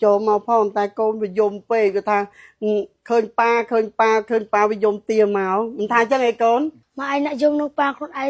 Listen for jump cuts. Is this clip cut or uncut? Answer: uncut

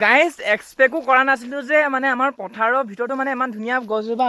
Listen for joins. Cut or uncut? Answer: uncut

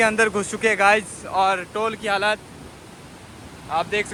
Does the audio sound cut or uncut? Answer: uncut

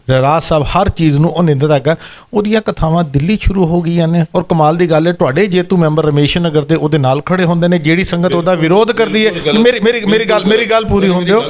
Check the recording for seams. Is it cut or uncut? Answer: uncut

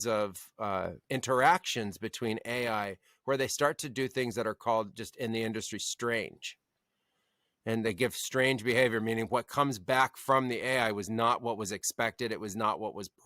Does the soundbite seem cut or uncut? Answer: cut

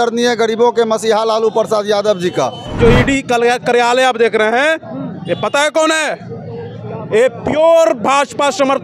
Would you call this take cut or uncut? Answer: cut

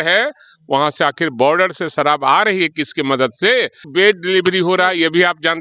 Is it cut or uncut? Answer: cut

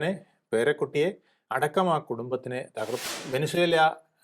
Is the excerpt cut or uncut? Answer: cut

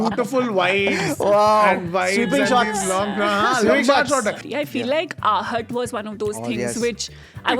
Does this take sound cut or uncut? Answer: cut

